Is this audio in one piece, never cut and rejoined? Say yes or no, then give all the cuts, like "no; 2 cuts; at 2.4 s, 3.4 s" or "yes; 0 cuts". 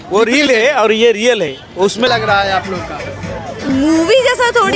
no; 1 cut; at 2.1 s